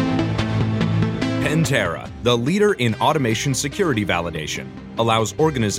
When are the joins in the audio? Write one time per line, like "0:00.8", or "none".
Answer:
0:01.5